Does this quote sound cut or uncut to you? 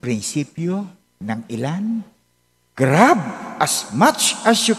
uncut